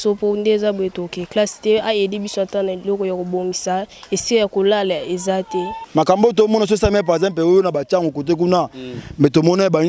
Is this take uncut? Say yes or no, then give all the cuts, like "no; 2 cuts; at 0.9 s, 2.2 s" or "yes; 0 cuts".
no; 1 cut; at 5.8 s